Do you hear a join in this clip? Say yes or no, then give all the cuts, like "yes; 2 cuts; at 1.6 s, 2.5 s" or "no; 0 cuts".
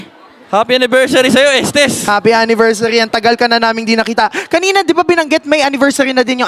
no; 0 cuts